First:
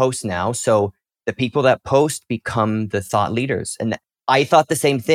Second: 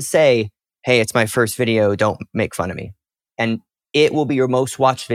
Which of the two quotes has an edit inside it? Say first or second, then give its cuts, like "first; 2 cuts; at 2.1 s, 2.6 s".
second; 1 cut; at 3.8 s